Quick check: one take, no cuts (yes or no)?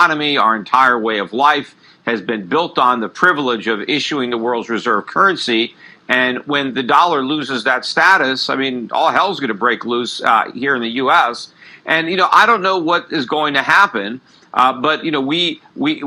no